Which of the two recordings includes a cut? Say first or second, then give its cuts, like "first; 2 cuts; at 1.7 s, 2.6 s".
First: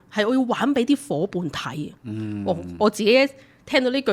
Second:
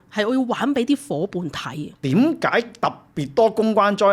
second; 1 cut; at 1.9 s